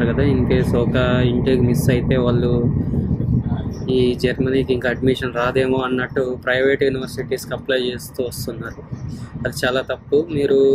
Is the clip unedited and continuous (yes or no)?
yes